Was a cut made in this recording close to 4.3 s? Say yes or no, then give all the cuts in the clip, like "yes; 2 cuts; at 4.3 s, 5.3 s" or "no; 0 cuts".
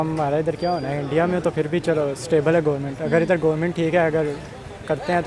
no; 0 cuts